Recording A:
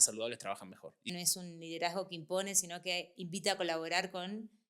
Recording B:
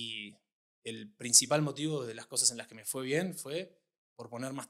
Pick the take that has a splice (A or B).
A